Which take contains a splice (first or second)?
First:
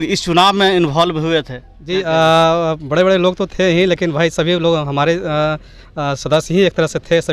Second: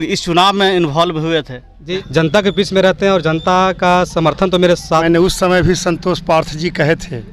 second